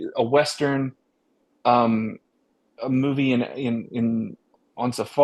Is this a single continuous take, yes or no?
yes